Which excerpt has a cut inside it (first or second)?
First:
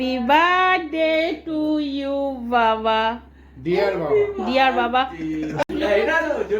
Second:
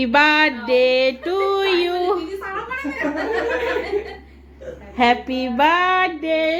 first